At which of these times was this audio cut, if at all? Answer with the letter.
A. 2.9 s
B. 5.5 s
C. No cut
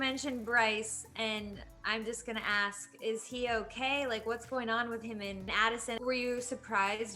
B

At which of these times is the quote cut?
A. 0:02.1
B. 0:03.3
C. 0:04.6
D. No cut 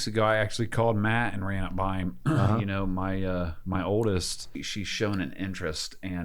C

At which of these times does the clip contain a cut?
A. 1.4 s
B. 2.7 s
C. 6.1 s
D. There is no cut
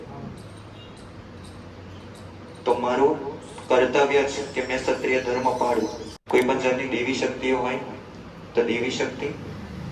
C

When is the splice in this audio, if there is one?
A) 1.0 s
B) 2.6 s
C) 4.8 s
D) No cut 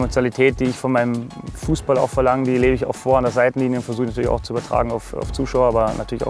D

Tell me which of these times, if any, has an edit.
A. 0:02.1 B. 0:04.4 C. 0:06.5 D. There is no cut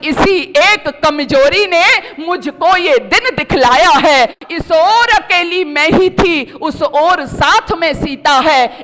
B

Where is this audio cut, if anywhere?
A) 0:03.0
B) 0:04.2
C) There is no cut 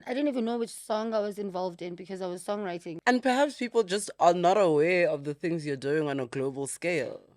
A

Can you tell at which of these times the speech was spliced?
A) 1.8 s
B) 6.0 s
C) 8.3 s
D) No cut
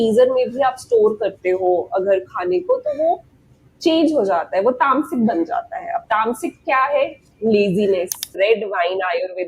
C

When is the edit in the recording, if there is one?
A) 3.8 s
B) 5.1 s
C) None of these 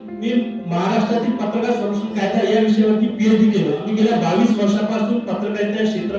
A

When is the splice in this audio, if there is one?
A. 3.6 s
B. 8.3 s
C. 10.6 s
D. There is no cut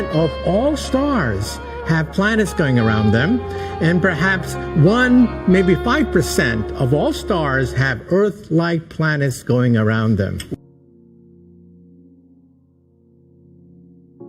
C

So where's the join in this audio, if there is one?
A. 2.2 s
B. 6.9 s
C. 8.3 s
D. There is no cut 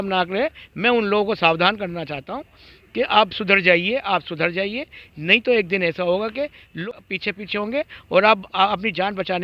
B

